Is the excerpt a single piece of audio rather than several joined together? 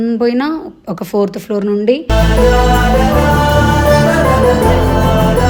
yes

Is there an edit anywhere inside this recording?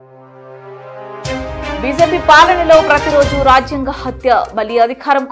yes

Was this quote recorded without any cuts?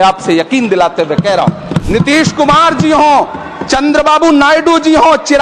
no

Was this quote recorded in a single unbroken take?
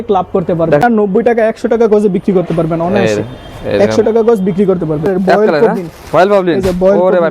no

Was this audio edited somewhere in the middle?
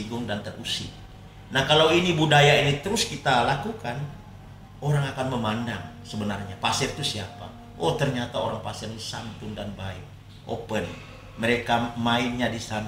no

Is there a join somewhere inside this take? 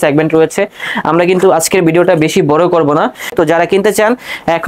yes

